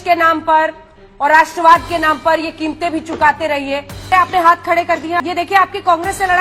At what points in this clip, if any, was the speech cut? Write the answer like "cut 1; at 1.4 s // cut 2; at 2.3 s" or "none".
cut 1; at 4.1 s // cut 2; at 5.2 s